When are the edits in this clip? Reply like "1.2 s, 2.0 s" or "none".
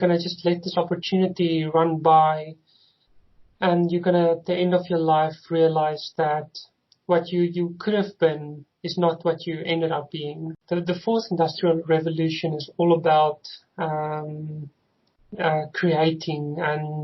10.5 s